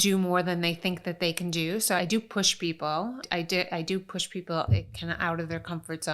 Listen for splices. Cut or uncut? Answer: cut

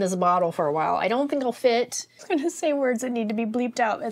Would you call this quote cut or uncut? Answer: cut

